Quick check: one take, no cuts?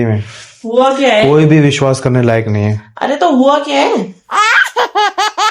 no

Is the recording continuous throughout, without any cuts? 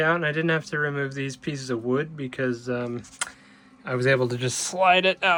yes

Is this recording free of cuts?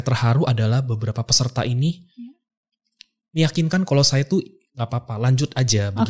yes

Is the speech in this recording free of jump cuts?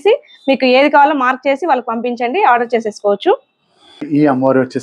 no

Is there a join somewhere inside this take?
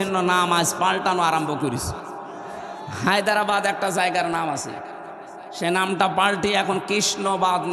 no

